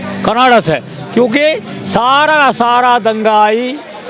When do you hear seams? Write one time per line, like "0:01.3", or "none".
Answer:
none